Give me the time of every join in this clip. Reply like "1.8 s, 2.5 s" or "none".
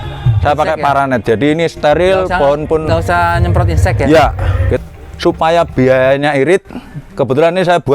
4.8 s